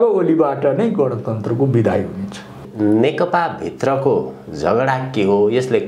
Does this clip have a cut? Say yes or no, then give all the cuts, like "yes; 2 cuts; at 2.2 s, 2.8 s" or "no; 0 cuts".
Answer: yes; 1 cut; at 2.6 s